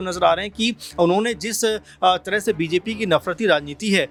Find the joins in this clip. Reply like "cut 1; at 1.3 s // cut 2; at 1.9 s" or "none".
none